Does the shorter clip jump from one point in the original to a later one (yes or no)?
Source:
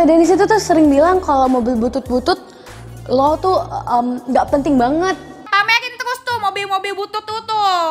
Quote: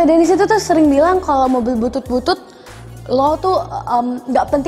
no